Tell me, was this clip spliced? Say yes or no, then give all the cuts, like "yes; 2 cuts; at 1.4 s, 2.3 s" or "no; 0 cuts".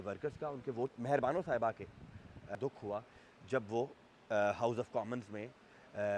yes; 2 cuts; at 0.9 s, 2.6 s